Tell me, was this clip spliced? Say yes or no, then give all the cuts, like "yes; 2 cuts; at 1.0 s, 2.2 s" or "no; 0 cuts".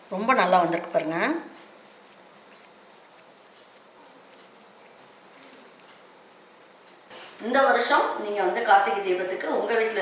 yes; 1 cut; at 4.0 s